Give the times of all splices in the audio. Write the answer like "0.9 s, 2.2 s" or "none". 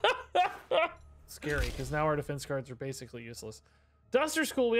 none